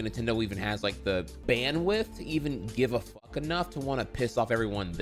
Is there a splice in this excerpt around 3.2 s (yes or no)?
no